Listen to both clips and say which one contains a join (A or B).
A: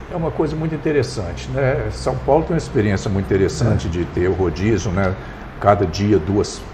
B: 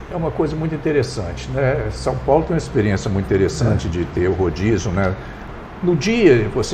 B